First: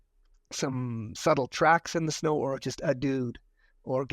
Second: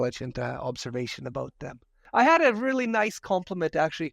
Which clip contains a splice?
second; 1 cut; at 2.0 s

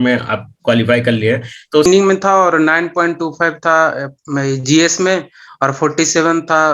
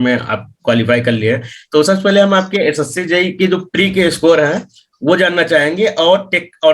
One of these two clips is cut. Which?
first; 1 cut; at 1.9 s

